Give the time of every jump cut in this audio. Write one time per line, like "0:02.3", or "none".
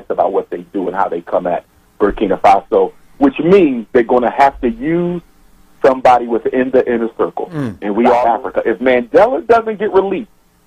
0:08.2